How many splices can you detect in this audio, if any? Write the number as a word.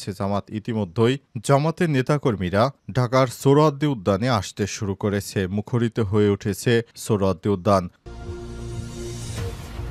one